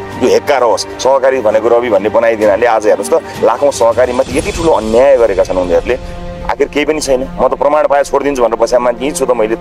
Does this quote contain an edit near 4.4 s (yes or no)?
no